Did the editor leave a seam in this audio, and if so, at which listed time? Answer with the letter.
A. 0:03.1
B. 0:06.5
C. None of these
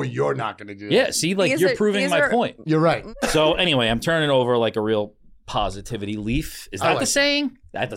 A